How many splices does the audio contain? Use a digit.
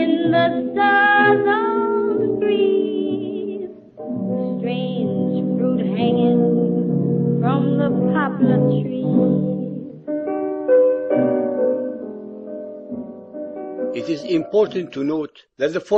1